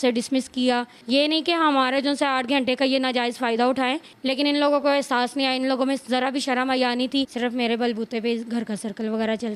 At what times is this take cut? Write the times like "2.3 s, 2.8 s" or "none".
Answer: 0.9 s, 4.1 s, 7.3 s